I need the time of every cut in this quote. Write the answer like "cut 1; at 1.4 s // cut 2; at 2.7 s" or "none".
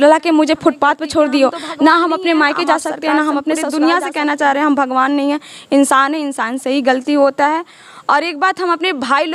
cut 1; at 3.6 s